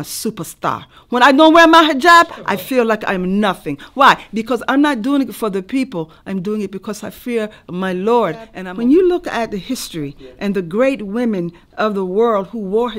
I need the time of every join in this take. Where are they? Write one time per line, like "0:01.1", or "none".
0:08.6